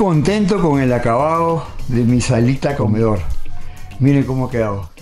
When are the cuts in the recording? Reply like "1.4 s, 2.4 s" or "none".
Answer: 2.8 s

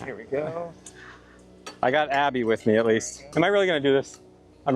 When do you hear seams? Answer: 3.2 s

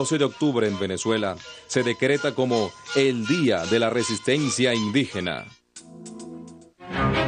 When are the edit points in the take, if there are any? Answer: 5.4 s

